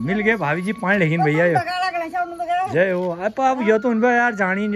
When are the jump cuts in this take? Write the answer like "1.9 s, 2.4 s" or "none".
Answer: none

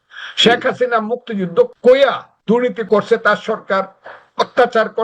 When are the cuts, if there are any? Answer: 1.7 s, 2.8 s

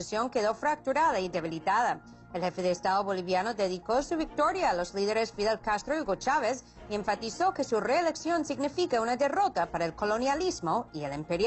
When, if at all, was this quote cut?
none

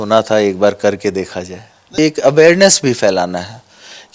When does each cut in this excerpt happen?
2.0 s

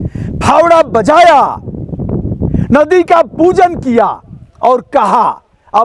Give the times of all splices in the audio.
none

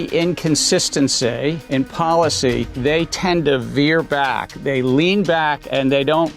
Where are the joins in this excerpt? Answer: 1.6 s, 2.7 s, 4.5 s

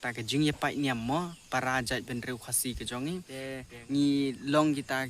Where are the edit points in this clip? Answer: 3.6 s

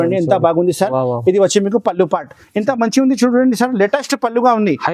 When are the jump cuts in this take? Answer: none

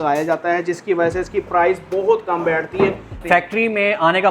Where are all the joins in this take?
3.2 s

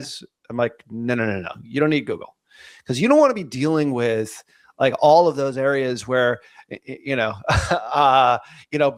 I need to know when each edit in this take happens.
none

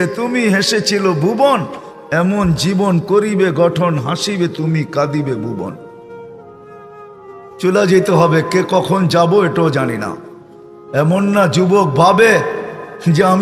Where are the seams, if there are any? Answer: none

